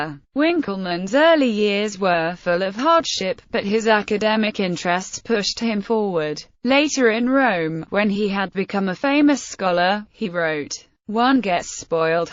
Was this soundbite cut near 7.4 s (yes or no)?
yes